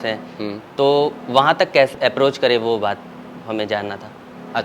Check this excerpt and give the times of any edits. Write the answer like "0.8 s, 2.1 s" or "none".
1.9 s